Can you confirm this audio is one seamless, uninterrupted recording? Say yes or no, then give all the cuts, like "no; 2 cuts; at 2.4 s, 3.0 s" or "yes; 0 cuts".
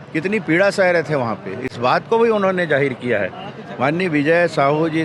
yes; 0 cuts